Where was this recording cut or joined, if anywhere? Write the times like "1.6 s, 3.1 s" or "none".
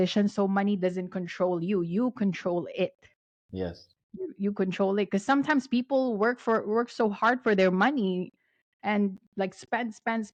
none